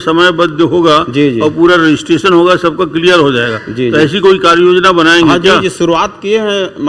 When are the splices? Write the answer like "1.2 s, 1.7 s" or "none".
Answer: none